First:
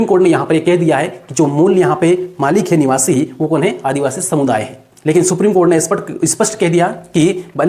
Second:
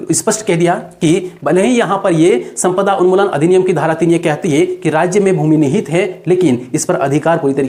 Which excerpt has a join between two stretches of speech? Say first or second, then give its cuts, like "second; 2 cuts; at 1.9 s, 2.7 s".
first; 1 cut; at 4.9 s